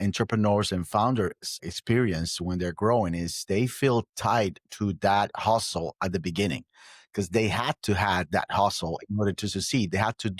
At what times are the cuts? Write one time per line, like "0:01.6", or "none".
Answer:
0:01.7

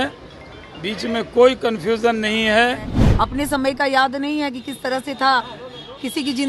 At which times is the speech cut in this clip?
0:03.0

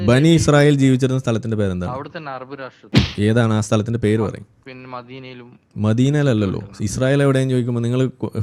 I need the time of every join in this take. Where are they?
none

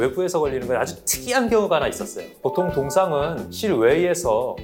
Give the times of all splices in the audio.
none

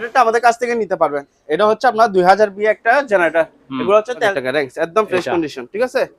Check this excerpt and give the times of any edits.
0:04.3

